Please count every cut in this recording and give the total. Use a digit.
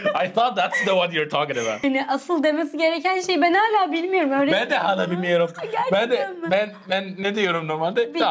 1